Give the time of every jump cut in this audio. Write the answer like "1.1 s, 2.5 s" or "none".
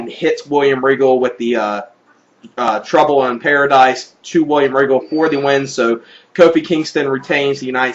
6.2 s